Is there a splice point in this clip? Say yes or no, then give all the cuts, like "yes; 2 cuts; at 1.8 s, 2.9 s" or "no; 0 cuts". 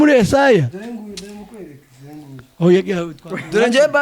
no; 0 cuts